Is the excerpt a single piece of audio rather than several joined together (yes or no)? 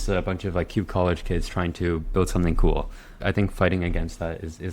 no